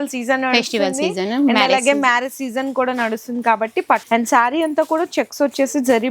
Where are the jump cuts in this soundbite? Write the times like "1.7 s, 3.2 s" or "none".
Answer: 4.0 s